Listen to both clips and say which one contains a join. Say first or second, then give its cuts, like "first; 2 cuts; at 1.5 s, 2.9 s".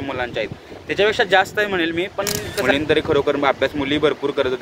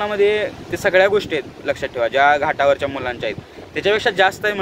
first; 1 cut; at 2.7 s